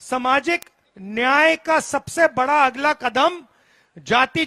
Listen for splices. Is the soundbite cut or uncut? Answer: uncut